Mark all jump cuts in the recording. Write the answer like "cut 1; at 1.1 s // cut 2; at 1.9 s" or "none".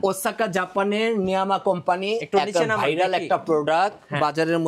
none